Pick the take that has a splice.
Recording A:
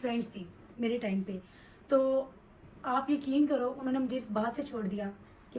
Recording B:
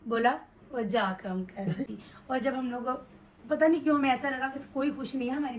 B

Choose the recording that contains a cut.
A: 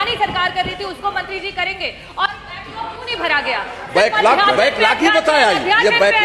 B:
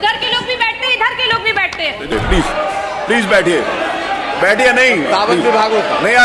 B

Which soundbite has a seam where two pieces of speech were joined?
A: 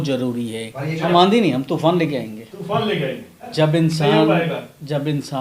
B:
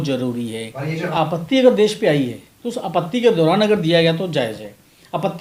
A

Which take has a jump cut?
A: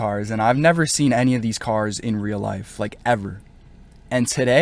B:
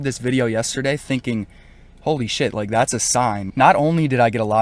B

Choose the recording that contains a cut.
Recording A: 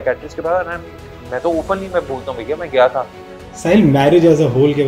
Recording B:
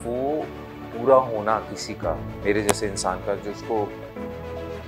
A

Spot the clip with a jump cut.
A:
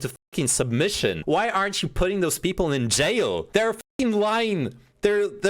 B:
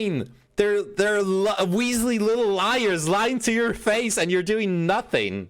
A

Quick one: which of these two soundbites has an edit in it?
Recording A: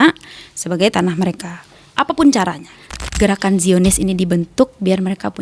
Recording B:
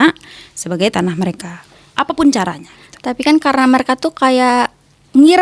A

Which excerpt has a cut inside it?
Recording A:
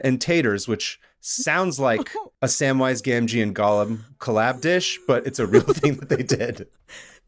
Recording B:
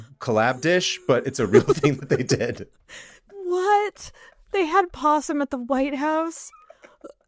A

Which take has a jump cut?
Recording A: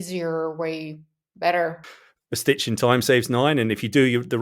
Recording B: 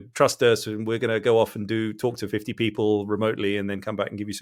A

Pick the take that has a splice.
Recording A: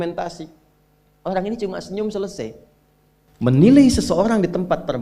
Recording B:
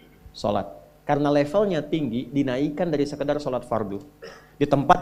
A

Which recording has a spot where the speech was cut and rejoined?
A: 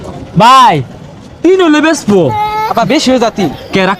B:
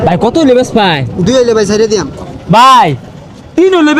A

